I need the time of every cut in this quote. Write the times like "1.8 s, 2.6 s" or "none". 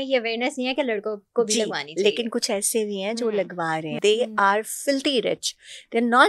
4.0 s